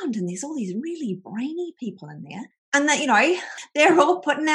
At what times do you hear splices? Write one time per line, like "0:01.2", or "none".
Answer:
0:03.6